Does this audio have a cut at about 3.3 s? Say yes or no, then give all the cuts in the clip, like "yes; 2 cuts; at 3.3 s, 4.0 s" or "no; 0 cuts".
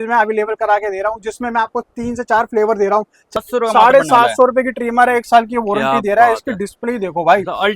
yes; 1 cut; at 3.3 s